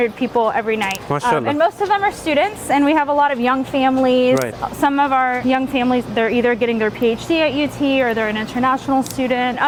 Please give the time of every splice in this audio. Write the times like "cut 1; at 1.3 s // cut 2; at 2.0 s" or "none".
none